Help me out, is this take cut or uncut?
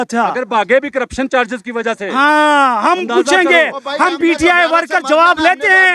uncut